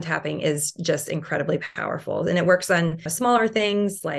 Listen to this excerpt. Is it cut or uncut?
cut